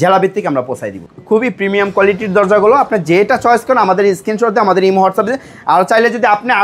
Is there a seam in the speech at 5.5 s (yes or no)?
no